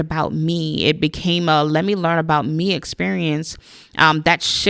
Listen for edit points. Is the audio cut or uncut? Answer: uncut